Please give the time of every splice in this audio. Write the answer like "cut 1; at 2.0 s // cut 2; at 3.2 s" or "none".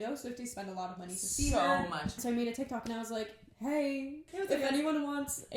cut 1; at 2.2 s // cut 2; at 4.3 s

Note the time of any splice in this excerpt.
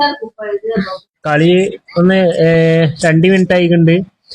cut 1; at 1.2 s

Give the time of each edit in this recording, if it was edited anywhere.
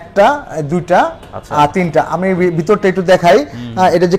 none

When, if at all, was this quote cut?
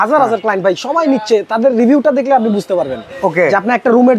none

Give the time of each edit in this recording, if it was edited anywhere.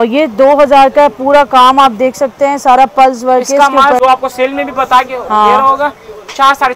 cut 1; at 4.0 s

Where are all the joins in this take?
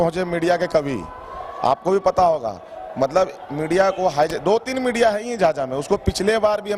none

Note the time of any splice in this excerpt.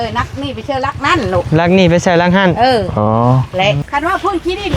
cut 1; at 3.8 s

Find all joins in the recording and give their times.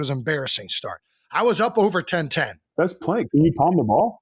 cut 1; at 2.7 s

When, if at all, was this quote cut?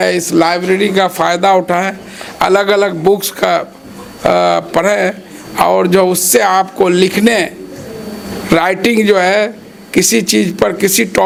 none

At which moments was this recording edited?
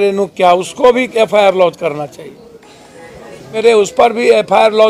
cut 1; at 3.5 s

